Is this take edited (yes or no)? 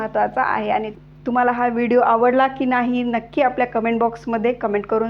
yes